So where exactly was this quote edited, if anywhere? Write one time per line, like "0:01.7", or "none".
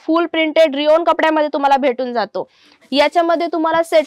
0:02.7

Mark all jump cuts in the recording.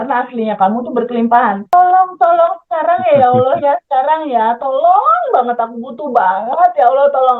0:01.7

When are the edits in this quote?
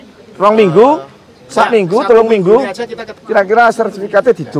0:03.1

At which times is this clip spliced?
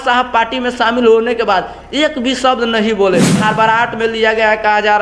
0:03.4

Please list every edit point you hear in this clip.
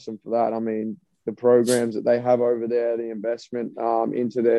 none

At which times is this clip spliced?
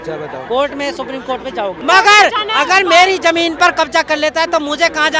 0:01.8

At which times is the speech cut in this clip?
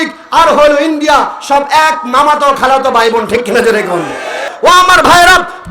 0:04.5

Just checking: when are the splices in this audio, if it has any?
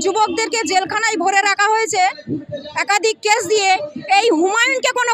none

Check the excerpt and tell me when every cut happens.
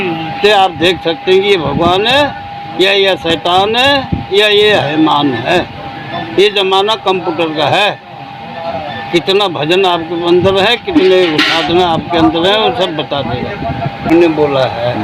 0:14.1

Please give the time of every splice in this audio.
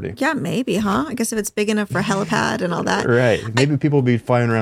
none

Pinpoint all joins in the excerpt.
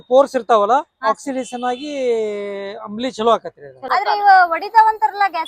0:03.8

